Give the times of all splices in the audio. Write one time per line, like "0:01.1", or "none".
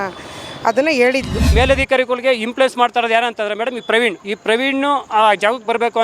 0:01.5
0:04.3